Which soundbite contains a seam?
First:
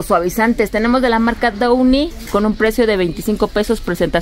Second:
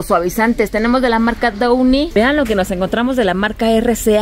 second; 1 cut; at 2.1 s

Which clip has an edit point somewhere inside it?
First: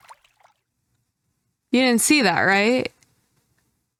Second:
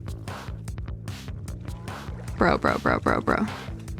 second; 1 cut; at 2.4 s

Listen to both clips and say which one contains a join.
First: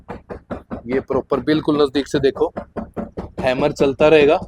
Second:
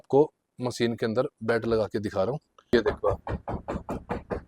second; 1 cut; at 2.7 s

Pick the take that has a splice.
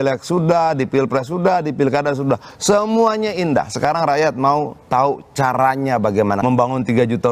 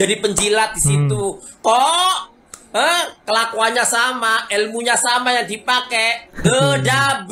first; 1 cut; at 6.4 s

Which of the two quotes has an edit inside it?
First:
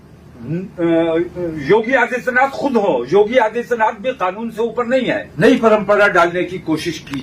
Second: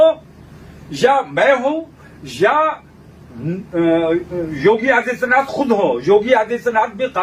first; 1 cut; at 5.3 s

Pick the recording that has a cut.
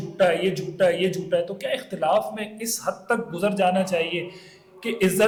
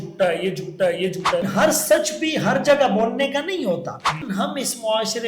second; 2 cuts; at 1.4 s, 4.1 s

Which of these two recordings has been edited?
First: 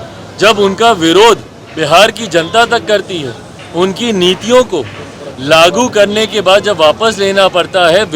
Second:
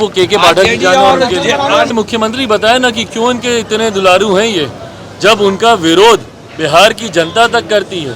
second; 1 cut; at 1.9 s

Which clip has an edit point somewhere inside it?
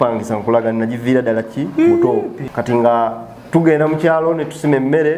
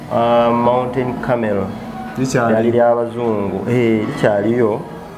first; 1 cut; at 2.4 s

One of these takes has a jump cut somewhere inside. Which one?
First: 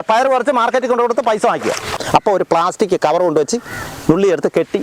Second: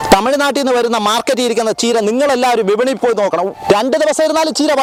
first; 1 cut; at 2.0 s

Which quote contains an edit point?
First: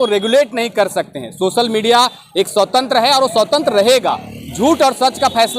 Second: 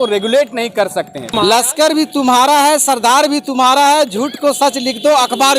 second; 1 cut; at 1.3 s

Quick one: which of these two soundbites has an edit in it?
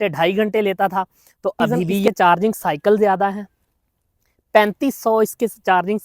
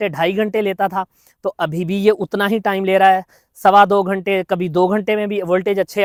first; 1 cut; at 2.1 s

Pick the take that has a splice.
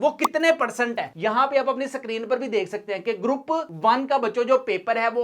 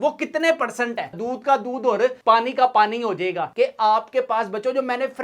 second; 2 cuts; at 1.2 s, 3.5 s

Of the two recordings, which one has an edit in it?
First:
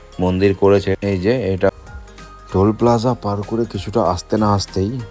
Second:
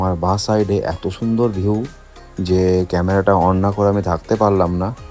first; 1 cut; at 1.7 s

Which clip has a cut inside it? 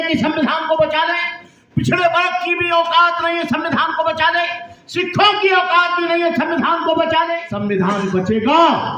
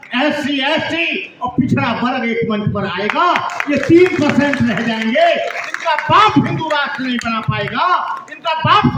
first; 1 cut; at 7.4 s

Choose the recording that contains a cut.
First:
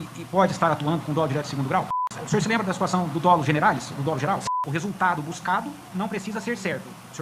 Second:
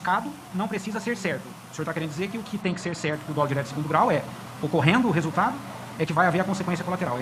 first; 2 cuts; at 2.1 s, 4.4 s

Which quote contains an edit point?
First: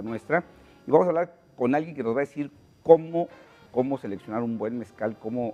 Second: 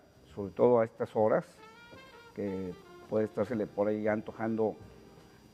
second; 1 cut; at 1.1 s

